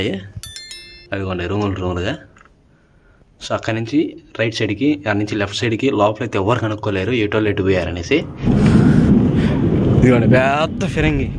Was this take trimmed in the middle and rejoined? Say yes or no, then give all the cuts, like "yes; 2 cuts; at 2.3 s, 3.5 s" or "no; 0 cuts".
yes; 1 cut; at 8.4 s